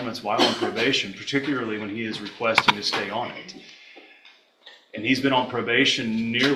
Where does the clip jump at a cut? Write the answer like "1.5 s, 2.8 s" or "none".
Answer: none